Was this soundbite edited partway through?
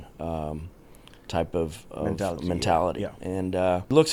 no; 0 cuts

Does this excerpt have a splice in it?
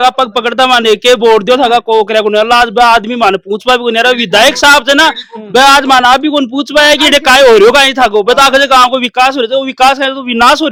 no; 0 cuts

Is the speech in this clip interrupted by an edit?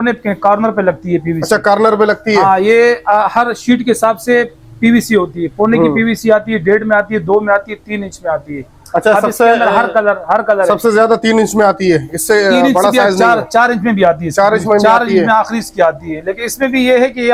no; 0 cuts

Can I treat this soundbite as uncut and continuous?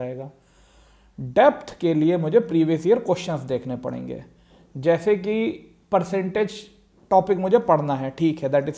yes; 0 cuts

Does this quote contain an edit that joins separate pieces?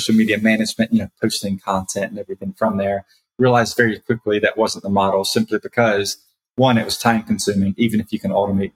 no; 0 cuts

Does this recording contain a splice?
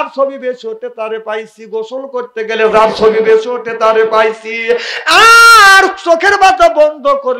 no; 0 cuts

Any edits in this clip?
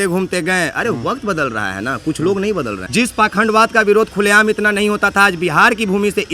yes; 1 cut; at 2.8 s

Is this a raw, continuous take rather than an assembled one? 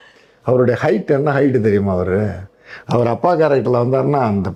yes; 0 cuts

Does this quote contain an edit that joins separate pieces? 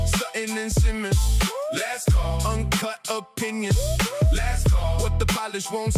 no; 0 cuts

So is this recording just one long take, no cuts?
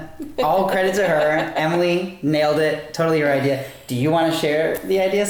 yes; 0 cuts

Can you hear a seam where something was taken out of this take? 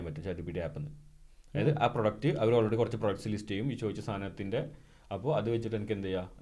no; 0 cuts

